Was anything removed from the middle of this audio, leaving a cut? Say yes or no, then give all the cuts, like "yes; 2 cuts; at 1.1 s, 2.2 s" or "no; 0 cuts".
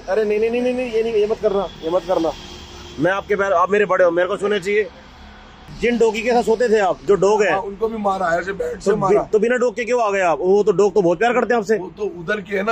yes; 1 cut; at 5.7 s